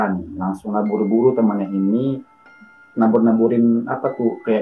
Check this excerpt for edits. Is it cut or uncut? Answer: uncut